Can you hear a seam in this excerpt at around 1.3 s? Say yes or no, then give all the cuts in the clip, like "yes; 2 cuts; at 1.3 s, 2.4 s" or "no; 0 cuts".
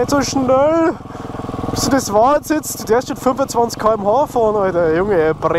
no; 0 cuts